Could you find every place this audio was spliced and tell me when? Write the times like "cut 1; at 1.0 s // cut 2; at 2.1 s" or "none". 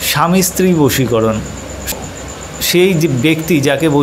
cut 1; at 2.0 s